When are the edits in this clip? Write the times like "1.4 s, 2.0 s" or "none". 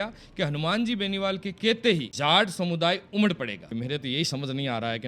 2.1 s, 3.6 s